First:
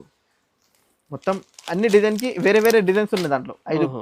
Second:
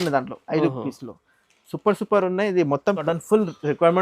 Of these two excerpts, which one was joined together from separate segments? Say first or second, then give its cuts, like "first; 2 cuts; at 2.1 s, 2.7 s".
second; 1 cut; at 3.0 s